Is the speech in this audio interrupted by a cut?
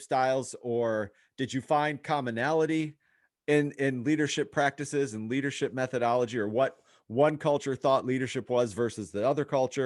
no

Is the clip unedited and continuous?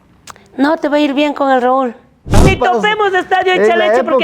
no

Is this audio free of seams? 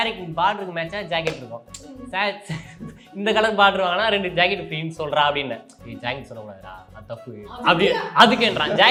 yes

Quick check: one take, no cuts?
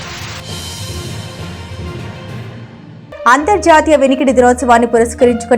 no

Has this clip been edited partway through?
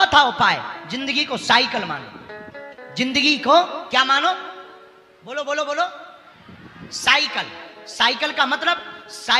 no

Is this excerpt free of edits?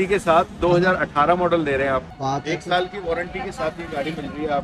no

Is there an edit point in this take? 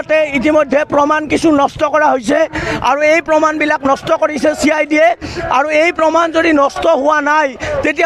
no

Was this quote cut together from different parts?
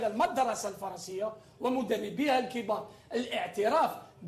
no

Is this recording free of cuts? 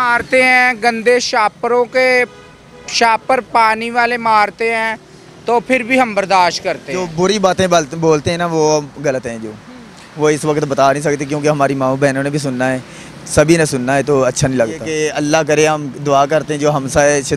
no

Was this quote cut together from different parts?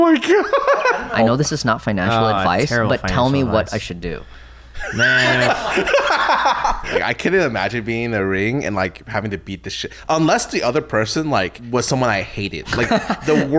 yes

